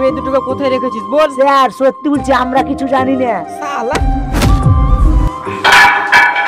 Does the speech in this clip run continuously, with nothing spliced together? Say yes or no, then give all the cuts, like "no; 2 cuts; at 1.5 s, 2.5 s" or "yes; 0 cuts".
yes; 0 cuts